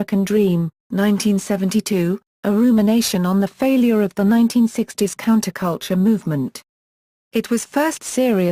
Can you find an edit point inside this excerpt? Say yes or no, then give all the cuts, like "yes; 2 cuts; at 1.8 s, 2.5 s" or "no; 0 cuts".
yes; 1 cut; at 5.2 s